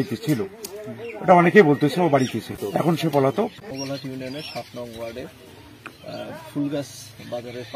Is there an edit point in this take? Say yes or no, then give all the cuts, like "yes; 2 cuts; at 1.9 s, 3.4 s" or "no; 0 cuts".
yes; 2 cuts; at 2.6 s, 3.6 s